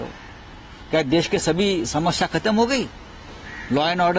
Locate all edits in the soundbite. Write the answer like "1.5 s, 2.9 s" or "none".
none